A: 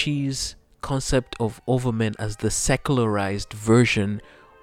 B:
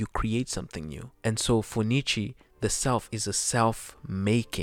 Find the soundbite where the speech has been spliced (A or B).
B